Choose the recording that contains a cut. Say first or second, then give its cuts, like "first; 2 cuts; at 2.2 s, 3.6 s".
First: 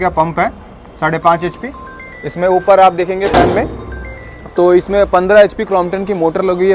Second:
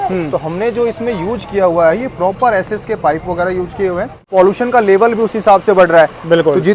second; 1 cut; at 4.3 s